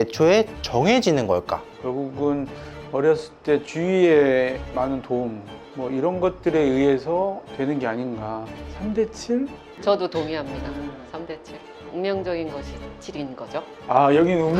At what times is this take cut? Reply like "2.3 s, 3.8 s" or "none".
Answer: 1.7 s